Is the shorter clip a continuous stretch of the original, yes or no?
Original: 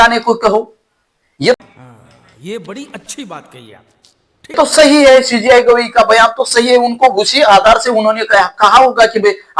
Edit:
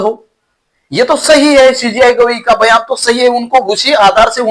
no